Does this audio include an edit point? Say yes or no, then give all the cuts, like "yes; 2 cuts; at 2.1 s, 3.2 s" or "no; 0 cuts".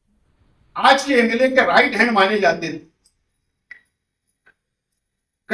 no; 0 cuts